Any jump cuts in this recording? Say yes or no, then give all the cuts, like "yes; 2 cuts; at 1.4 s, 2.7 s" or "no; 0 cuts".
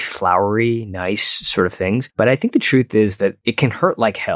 yes; 2 cuts; at 2.1 s, 3.4 s